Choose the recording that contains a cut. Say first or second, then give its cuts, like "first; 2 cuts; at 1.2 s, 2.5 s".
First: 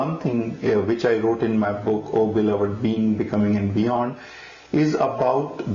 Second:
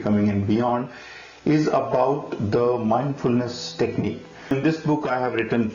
second; 1 cut; at 4.5 s